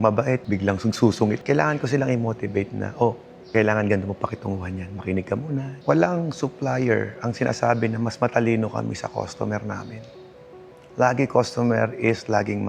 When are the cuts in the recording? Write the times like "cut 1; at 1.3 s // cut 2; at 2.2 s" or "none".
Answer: cut 1; at 1.4 s // cut 2; at 5.7 s